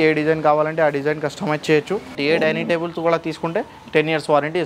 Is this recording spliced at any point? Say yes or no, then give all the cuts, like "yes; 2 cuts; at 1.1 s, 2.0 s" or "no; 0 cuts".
yes; 1 cut; at 2.2 s